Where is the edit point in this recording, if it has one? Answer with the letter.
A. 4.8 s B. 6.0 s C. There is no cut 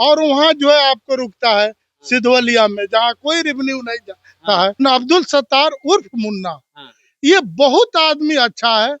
A